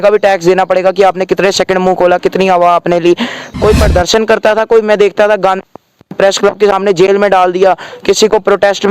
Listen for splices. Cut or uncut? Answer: cut